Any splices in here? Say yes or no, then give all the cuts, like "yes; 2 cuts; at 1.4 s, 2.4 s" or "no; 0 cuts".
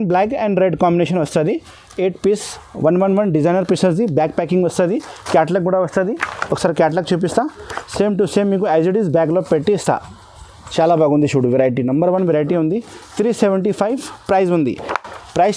no; 0 cuts